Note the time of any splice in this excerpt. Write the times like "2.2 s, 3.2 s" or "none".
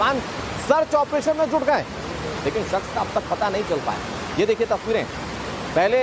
2.1 s